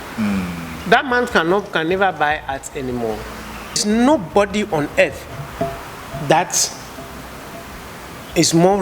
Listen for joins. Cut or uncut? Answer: cut